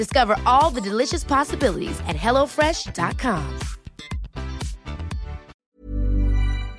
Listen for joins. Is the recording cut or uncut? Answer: cut